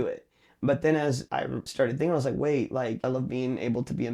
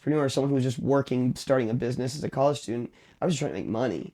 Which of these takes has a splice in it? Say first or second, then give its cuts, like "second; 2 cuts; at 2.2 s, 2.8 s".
first; 2 cuts; at 1.4 s, 3.0 s